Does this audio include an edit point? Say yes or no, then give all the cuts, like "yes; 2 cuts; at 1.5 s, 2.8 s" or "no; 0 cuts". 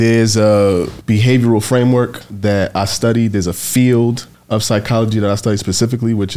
yes; 3 cuts; at 0.9 s, 2.2 s, 4.3 s